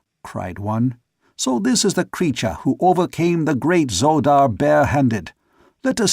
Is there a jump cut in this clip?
yes; 1 cut; at 2.0 s

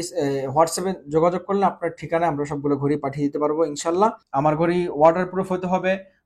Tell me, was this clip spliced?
yes; 1 cut; at 4.2 s

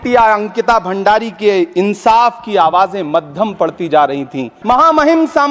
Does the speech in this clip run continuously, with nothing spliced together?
no; 1 cut; at 4.5 s

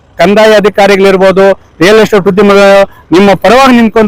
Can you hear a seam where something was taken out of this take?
no; 0 cuts

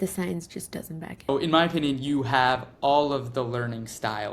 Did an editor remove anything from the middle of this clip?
yes; 1 cut; at 1.3 s

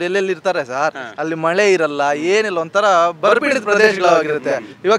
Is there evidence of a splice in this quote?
no; 0 cuts

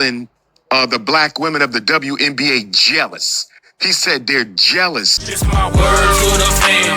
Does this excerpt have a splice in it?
yes; 1 cut; at 5.2 s

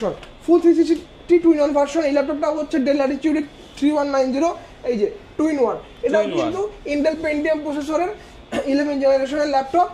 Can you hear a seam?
no; 0 cuts

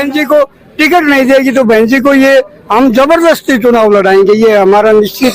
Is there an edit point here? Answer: no; 0 cuts

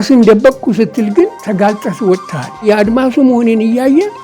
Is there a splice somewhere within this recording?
yes; 2 cuts; at 1.4 s, 2.6 s

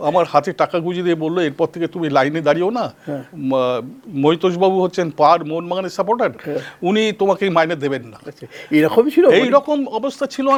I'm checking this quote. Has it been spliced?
no; 0 cuts

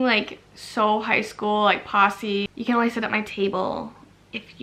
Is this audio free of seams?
yes; 0 cuts

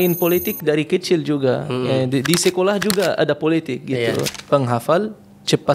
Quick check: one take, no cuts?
no; 1 cut; at 4.3 s

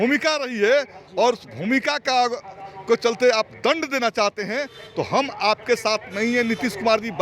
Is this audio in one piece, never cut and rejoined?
yes; 0 cuts

